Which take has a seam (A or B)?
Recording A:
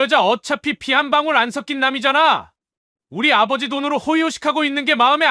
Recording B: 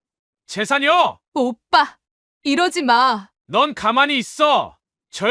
B